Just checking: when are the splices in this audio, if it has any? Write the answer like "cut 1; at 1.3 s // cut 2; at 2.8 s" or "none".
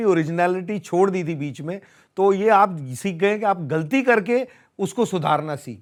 none